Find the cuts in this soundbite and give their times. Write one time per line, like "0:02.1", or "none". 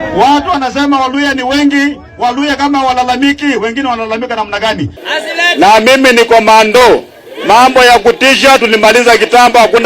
0:05.1